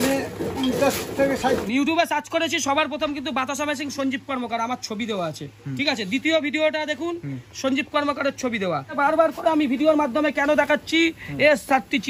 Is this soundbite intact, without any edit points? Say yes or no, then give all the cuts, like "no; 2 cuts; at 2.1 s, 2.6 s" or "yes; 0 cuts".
no; 2 cuts; at 1.5 s, 8.9 s